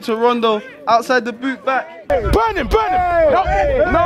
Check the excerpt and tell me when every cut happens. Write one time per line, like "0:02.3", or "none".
0:02.1